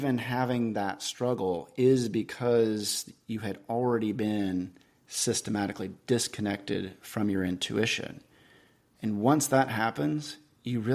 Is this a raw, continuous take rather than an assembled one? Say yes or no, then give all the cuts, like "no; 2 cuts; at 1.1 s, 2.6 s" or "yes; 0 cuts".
yes; 0 cuts